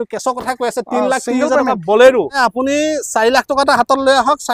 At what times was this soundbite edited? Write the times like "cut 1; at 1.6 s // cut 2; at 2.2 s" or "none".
cut 1; at 2.4 s